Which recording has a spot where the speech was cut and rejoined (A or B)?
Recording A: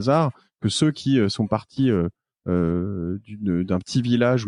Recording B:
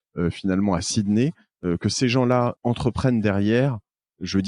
B